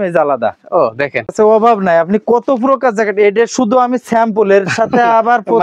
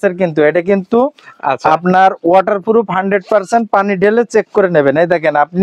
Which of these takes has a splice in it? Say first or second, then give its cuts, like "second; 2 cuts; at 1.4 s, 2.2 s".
first; 1 cut; at 1.3 s